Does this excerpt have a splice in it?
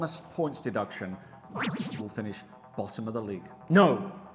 no; 0 cuts

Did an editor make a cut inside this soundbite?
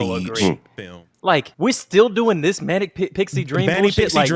yes; 1 cut; at 1.5 s

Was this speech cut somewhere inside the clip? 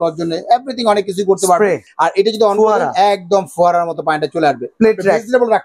yes; 2 cuts; at 1.9 s, 4.6 s

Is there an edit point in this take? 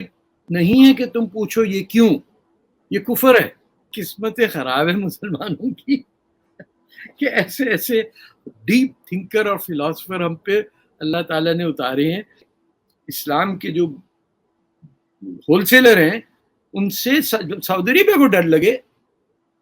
yes; 2 cuts; at 4.0 s, 12.5 s

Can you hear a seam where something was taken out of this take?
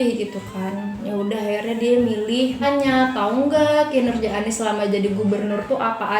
yes; 1 cut; at 2.6 s

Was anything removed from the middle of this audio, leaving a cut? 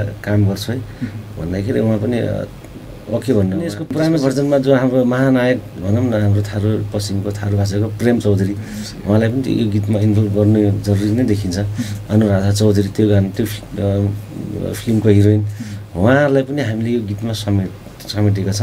yes; 1 cut; at 3.7 s

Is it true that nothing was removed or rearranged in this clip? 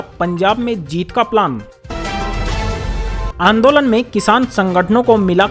no; 1 cut; at 1.7 s

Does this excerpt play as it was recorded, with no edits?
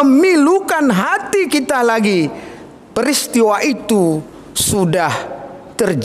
yes; 0 cuts

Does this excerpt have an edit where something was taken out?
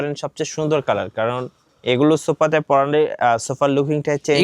no; 0 cuts

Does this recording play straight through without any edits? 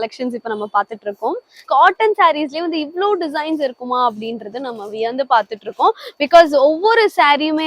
no; 1 cut; at 1.6 s

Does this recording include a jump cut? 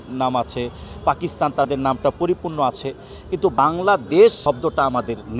yes; 2 cuts; at 3.6 s, 4.4 s

